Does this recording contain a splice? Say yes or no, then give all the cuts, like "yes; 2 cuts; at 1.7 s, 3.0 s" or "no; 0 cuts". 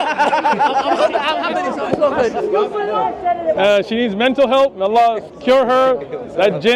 yes; 1 cut; at 3.0 s